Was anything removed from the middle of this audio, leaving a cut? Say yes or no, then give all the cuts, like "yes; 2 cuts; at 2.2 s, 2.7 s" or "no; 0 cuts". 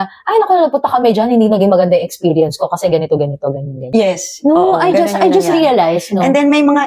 yes; 1 cut; at 3.8 s